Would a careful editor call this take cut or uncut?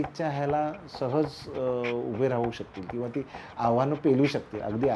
uncut